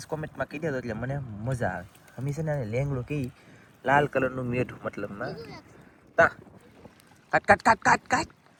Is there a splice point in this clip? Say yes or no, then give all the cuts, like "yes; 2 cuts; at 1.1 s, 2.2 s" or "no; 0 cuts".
no; 0 cuts